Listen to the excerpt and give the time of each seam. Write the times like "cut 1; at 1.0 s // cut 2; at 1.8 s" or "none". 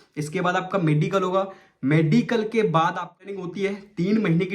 cut 1; at 3.4 s